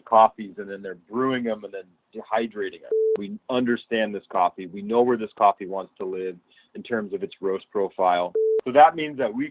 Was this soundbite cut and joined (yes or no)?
yes